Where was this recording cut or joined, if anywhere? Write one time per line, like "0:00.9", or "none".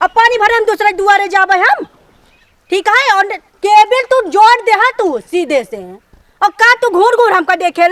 none